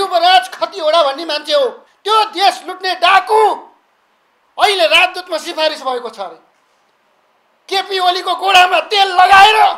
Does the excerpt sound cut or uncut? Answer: cut